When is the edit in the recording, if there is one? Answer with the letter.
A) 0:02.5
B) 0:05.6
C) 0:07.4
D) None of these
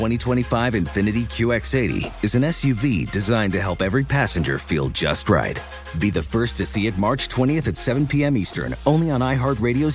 D